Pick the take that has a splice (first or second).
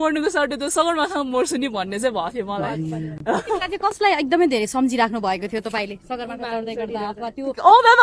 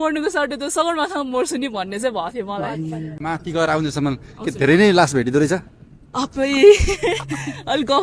second